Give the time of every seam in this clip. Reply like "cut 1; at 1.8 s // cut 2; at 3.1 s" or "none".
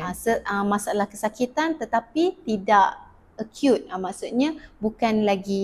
none